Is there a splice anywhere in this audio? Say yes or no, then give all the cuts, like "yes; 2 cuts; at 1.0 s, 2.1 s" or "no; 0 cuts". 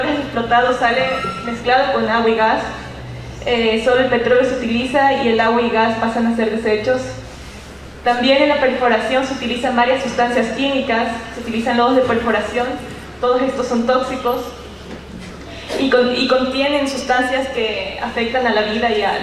yes; 1 cut; at 13.8 s